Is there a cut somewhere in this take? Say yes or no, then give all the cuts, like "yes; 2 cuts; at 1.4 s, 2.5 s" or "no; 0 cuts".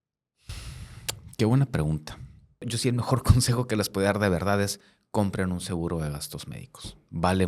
yes; 1 cut; at 2.7 s